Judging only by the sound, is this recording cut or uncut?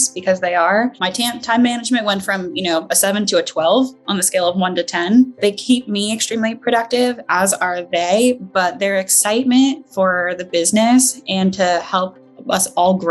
cut